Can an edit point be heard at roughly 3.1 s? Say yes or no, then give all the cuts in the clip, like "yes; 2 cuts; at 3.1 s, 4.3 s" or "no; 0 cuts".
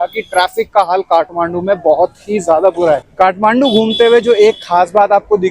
yes; 1 cut; at 3.1 s